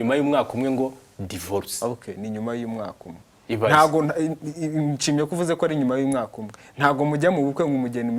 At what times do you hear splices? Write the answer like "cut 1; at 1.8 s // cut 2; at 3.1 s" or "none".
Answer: none